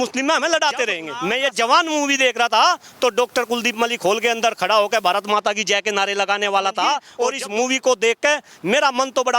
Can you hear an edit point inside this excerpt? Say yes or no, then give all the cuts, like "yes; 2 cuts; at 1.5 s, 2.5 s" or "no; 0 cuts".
yes; 2 cuts; at 1.1 s, 7.1 s